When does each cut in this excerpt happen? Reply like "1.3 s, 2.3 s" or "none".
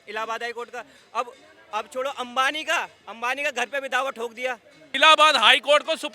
4.8 s